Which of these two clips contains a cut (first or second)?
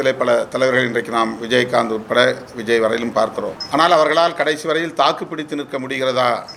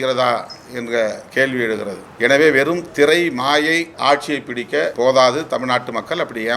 second